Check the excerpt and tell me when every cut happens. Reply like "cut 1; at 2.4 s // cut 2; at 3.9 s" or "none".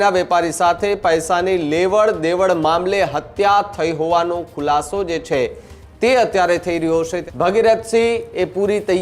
cut 1; at 7.2 s